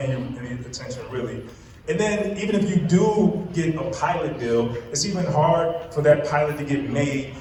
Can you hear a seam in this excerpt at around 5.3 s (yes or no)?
no